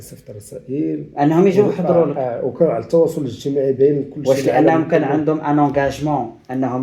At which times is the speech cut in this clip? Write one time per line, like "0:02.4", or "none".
none